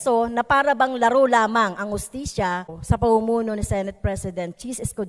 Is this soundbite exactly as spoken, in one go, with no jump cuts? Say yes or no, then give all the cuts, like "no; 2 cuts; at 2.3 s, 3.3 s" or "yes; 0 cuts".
no; 1 cut; at 2.8 s